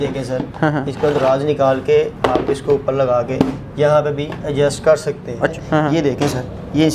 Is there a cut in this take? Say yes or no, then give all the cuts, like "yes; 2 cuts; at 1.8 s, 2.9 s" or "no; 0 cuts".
yes; 1 cut; at 5.5 s